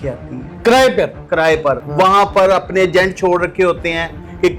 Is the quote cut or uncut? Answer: cut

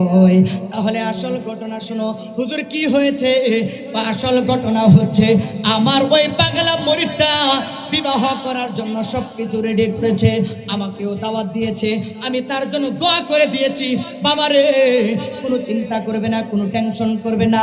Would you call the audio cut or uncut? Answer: uncut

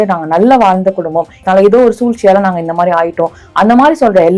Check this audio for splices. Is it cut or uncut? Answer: cut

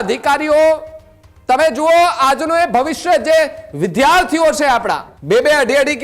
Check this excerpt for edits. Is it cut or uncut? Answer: cut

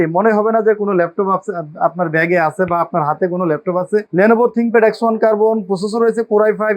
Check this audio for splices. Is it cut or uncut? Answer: cut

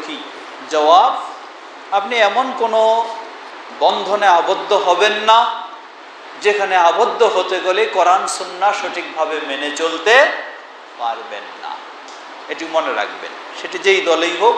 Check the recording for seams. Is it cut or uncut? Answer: uncut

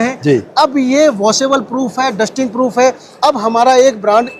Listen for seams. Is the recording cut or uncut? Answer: uncut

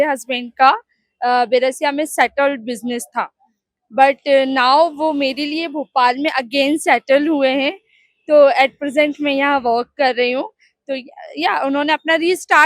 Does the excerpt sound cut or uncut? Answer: uncut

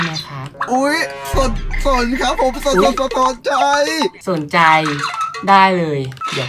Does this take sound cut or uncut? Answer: uncut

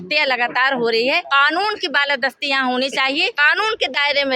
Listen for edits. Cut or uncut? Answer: cut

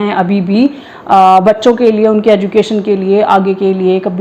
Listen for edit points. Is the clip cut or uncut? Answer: uncut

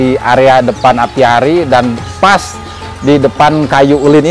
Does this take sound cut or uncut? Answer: uncut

